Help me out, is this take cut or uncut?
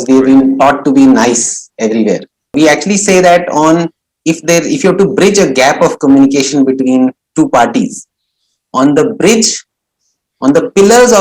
cut